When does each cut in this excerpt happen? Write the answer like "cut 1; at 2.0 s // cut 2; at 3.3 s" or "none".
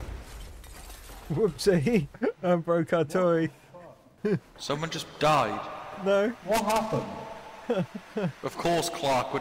none